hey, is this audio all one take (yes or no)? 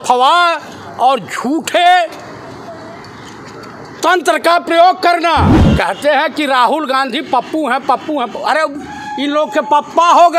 no